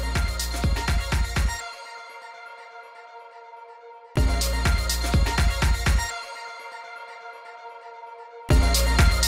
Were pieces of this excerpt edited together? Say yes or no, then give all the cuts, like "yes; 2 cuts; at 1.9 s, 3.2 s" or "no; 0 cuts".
yes; 2 cuts; at 3.8 s, 8.3 s